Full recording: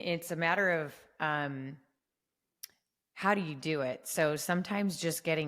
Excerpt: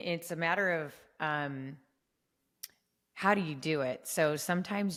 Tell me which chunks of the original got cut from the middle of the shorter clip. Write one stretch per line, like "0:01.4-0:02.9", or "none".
none